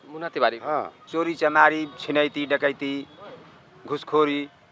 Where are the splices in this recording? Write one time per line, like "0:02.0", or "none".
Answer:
0:01.0